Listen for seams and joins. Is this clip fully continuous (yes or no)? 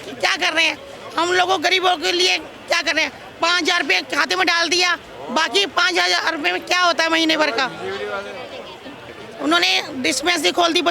no